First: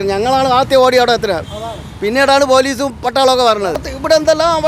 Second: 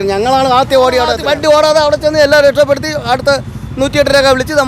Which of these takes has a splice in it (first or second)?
second